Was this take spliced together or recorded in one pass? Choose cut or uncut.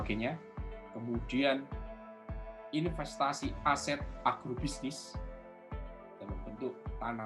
cut